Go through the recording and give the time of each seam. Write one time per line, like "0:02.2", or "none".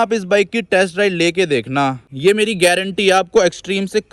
0:02.1